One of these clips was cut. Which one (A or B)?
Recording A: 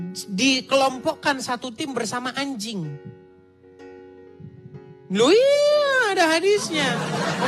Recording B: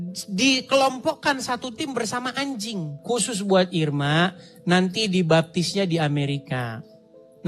B